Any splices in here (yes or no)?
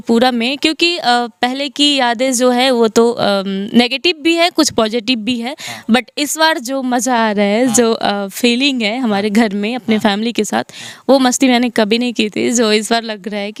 no